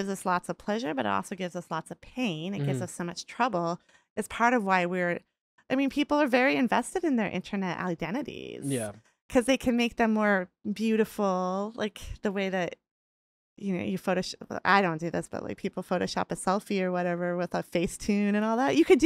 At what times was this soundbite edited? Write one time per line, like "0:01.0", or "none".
none